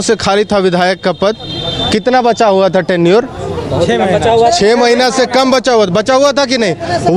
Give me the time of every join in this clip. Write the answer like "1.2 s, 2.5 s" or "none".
none